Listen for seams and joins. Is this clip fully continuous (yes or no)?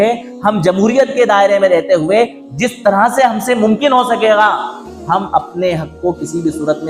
yes